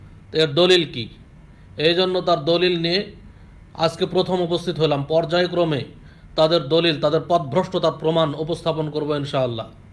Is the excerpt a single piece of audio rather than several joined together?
yes; 0 cuts

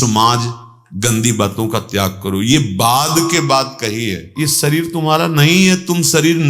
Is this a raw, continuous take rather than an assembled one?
no; 1 cut; at 4.3 s

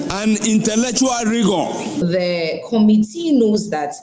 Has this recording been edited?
yes; 1 cut; at 2.0 s

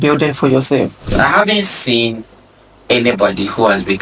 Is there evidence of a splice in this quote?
yes; 1 cut; at 1.1 s

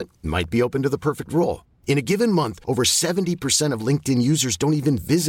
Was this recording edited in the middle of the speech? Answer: no; 0 cuts

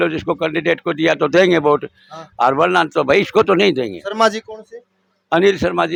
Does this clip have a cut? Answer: no; 0 cuts

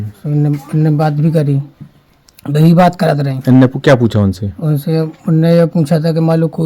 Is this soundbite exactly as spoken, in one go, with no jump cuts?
yes; 0 cuts

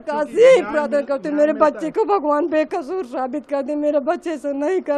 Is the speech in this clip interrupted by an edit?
no; 0 cuts

